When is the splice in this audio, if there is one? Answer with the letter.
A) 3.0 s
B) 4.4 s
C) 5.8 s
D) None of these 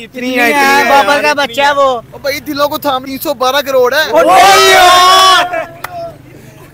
A